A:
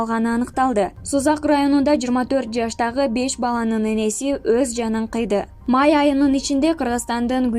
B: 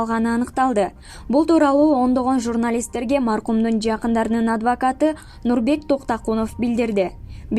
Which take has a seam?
A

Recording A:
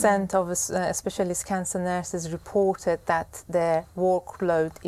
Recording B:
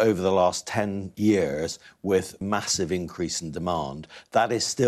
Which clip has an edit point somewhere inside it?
B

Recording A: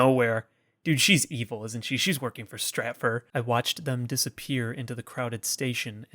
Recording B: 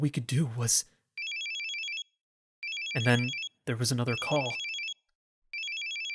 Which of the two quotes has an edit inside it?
A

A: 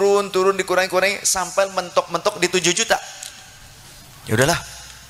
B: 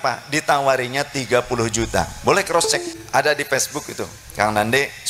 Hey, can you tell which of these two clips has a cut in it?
B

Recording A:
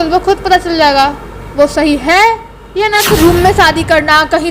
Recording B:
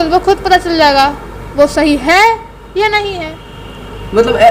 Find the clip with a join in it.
A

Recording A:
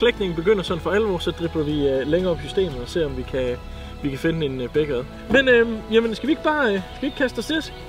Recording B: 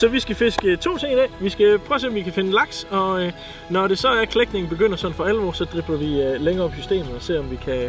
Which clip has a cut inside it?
A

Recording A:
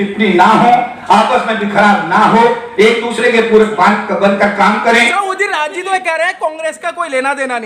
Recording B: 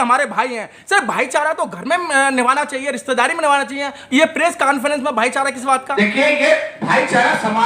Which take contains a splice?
A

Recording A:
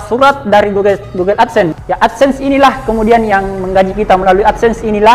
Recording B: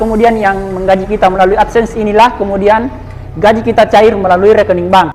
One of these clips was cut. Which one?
A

